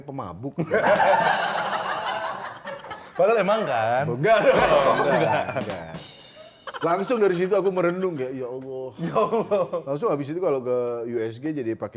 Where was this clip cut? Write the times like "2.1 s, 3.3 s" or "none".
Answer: none